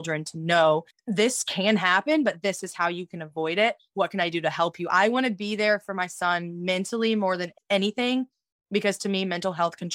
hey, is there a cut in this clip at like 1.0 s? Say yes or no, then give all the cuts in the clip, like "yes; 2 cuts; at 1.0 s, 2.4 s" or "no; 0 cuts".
yes; 2 cuts; at 1.0 s, 7.5 s